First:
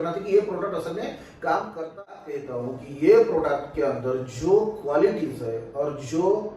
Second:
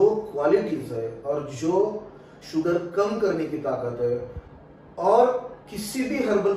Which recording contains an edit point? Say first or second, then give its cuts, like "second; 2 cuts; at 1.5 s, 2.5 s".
first; 1 cut; at 2.2 s